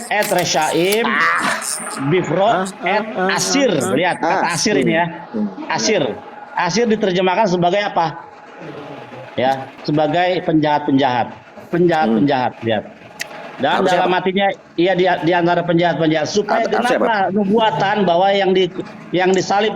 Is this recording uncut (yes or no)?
no